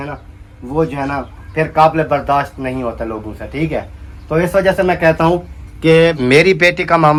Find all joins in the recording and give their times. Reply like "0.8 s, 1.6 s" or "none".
none